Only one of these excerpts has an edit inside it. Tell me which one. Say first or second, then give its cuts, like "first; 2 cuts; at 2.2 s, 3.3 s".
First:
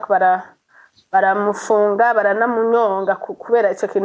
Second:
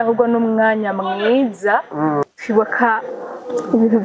second; 1 cut; at 2.2 s